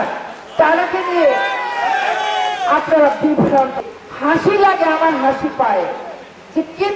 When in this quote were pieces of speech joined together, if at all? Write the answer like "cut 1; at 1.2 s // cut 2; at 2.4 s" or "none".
cut 1; at 3.8 s